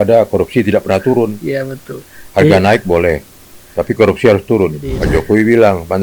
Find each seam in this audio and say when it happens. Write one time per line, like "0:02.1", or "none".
0:04.9